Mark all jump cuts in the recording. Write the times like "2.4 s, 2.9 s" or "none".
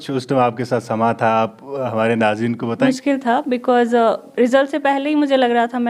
2.8 s